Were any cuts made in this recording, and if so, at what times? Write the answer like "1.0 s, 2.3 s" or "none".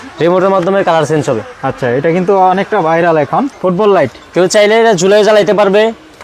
3.5 s